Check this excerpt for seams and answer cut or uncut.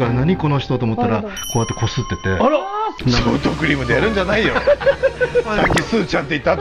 uncut